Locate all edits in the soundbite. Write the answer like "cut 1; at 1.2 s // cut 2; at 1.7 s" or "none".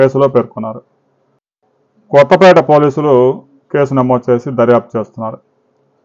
cut 1; at 1.9 s